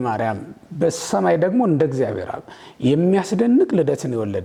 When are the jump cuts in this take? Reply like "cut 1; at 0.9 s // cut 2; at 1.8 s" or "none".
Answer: none